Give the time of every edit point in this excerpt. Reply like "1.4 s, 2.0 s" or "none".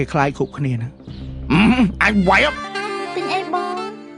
2.6 s

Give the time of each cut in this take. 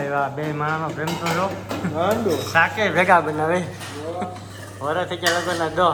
none

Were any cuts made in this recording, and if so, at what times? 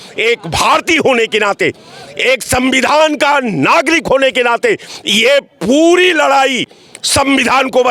none

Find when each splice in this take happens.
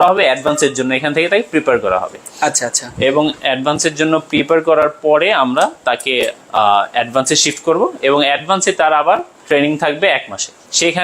none

